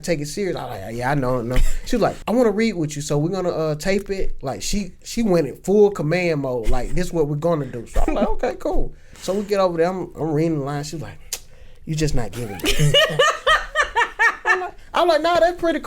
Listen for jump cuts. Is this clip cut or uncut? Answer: cut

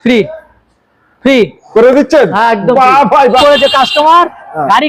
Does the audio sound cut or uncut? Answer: cut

